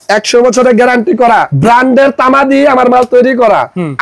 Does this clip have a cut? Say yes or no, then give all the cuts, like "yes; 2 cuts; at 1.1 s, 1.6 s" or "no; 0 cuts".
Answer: yes; 1 cut; at 1.5 s